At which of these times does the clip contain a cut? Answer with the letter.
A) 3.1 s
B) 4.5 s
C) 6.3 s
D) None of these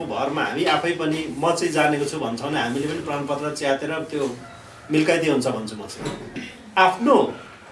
C